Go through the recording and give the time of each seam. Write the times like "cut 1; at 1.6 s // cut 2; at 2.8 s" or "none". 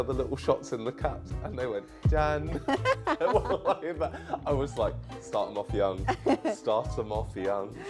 none